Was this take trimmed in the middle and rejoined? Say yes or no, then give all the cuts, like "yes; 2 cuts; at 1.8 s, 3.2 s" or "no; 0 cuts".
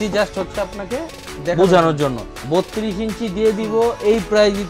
yes; 1 cut; at 2.3 s